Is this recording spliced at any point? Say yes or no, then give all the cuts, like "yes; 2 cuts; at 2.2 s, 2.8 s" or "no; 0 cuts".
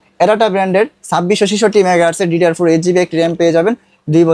no; 0 cuts